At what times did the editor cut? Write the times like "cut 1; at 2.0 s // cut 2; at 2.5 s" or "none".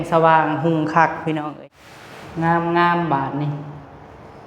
cut 1; at 1.5 s

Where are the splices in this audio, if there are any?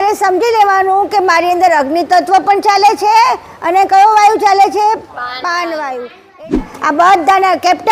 cut 1; at 6.6 s

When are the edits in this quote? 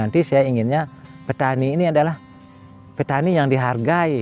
none

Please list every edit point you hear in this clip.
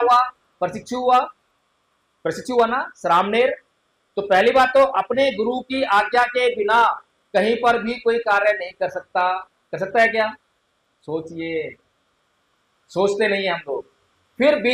none

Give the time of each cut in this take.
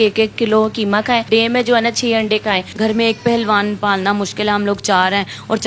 cut 1; at 1.3 s // cut 2; at 2.7 s

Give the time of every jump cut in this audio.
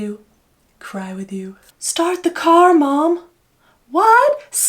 cut 1; at 1.7 s

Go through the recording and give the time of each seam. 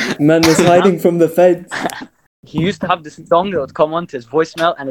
cut 1; at 2.3 s

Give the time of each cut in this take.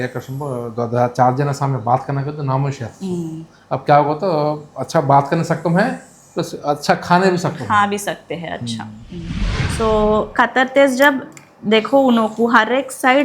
cut 1; at 9.6 s

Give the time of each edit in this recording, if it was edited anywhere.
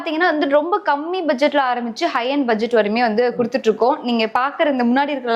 none

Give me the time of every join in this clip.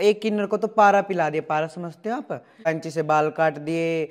cut 1; at 2.7 s

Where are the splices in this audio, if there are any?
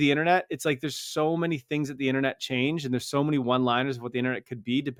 none

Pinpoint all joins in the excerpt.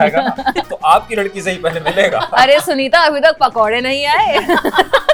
none

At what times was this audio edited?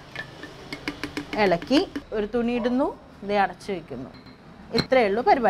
cut 1; at 2.0 s

